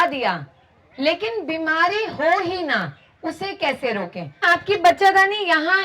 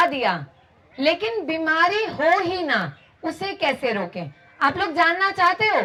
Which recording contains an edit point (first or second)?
first